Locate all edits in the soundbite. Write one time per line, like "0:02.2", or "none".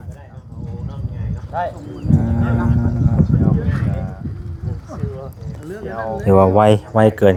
none